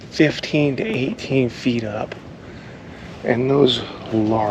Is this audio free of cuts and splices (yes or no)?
yes